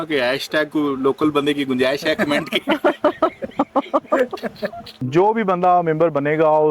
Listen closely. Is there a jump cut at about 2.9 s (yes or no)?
no